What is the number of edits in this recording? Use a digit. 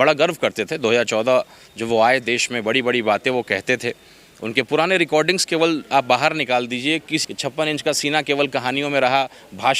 1